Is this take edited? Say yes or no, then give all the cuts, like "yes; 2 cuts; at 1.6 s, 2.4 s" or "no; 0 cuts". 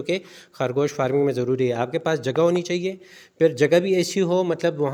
no; 0 cuts